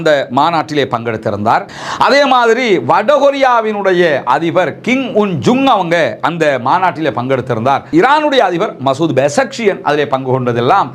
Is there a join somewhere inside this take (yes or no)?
yes